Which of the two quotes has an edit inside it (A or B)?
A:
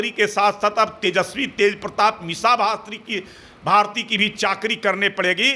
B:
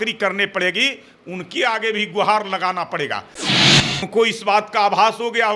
B